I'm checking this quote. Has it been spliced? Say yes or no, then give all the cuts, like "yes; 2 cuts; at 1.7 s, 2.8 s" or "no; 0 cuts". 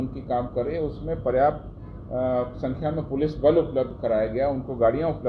no; 0 cuts